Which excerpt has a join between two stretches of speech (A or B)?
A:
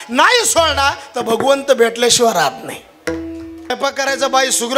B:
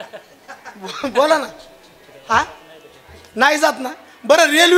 A